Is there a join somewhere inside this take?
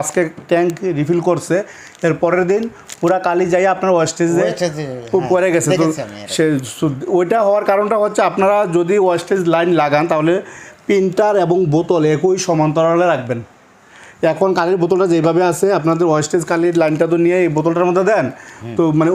no; 0 cuts

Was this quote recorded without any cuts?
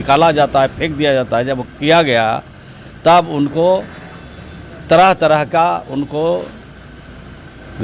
yes; 0 cuts

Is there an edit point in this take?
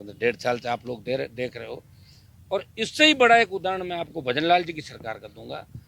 no; 0 cuts

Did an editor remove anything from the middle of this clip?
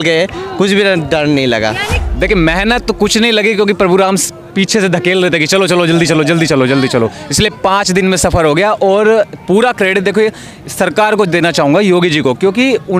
yes; 1 cut; at 1.9 s

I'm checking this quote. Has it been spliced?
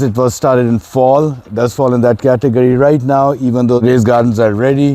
yes; 2 cuts; at 1.4 s, 3.8 s

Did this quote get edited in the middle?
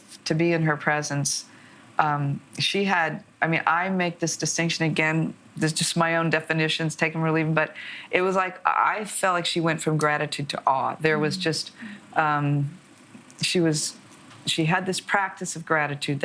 no; 0 cuts

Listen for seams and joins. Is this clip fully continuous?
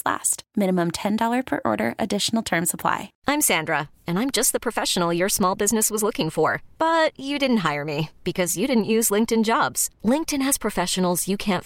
no; 1 cut; at 3.1 s

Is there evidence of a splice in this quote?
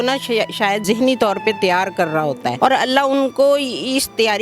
yes; 2 cuts; at 0.8 s, 2.6 s

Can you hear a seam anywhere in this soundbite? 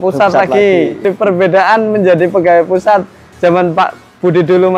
yes; 1 cut; at 1.0 s

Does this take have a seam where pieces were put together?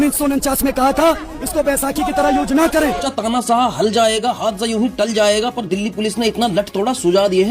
yes; 1 cut; at 3.1 s

